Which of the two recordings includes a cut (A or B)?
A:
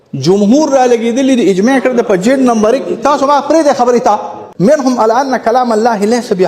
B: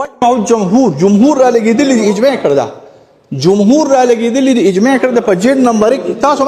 A